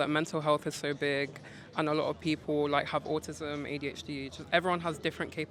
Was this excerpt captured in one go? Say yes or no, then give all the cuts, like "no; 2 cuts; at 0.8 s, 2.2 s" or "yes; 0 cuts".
yes; 0 cuts